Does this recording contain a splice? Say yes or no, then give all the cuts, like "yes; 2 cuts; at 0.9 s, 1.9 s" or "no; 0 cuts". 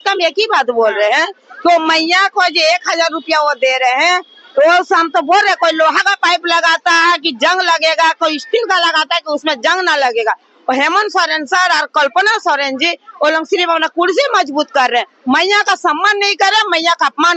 no; 0 cuts